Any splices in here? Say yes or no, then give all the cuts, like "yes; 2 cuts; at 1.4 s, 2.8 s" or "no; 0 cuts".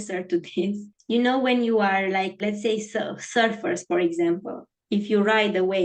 yes; 2 cuts; at 0.9 s, 2.4 s